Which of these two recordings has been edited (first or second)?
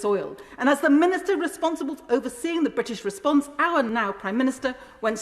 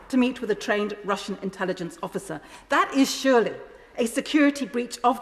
first